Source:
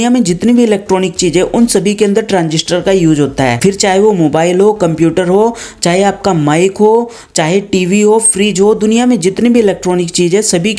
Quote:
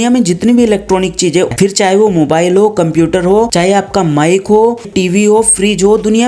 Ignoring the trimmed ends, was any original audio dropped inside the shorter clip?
yes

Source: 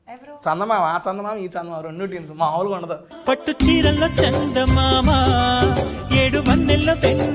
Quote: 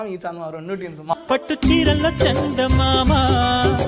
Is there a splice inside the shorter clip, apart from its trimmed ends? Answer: yes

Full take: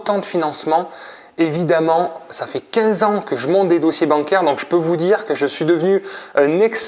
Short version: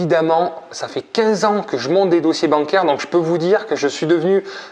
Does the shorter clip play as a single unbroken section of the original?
yes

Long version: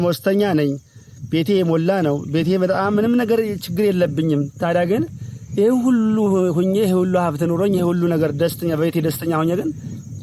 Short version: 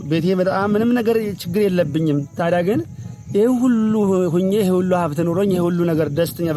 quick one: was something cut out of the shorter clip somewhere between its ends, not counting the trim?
no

